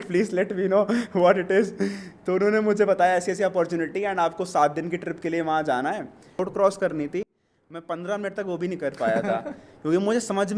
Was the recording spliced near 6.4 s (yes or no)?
yes